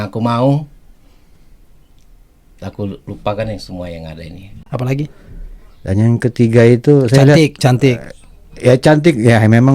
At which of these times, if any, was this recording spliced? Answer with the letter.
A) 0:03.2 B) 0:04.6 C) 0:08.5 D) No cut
B